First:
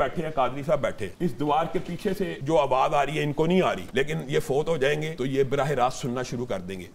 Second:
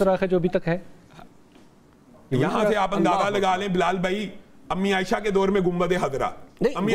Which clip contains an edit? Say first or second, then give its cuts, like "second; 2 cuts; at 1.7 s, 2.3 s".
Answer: first; 4 cuts; at 1.1 s, 2.4 s, 3.8 s, 5.1 s